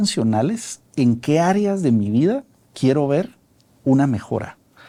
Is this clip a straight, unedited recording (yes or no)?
yes